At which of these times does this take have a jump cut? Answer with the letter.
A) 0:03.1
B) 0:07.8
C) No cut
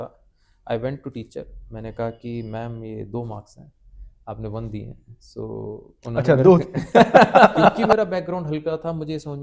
B